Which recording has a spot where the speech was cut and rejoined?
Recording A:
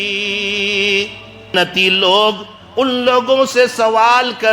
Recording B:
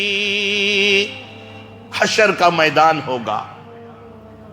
A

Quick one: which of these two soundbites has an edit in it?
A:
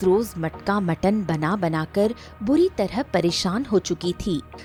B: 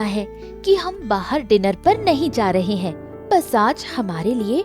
B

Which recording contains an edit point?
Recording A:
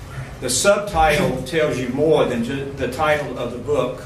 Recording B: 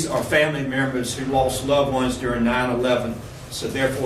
A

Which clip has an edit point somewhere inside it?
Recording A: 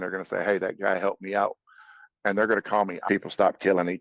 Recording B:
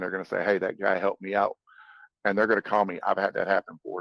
A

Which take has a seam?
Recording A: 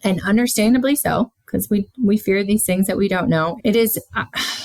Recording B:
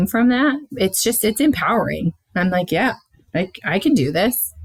A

